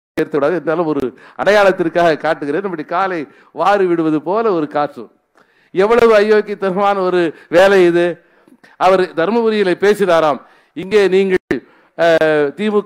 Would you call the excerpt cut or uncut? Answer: uncut